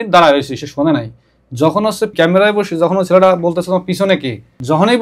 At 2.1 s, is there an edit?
yes; 1 cut; at 2.1 s

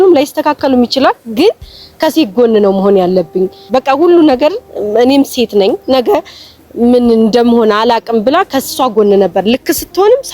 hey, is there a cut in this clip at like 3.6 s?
yes; 1 cut; at 3.6 s

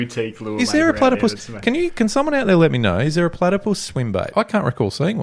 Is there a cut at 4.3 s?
yes; 1 cut; at 4.3 s

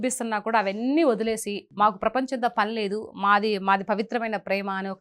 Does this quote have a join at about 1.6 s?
yes; 1 cut; at 1.6 s

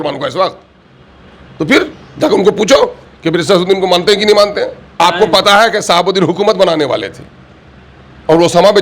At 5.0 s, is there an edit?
yes; 1 cut; at 5.0 s

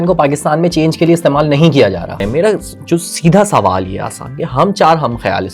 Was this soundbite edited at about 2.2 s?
yes; 1 cut; at 2.2 s

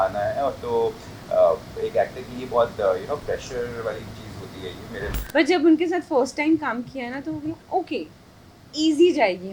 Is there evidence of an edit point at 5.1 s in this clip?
yes; 1 cut; at 5.1 s

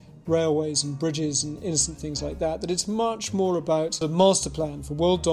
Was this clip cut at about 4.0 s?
yes; 1 cut; at 4.0 s

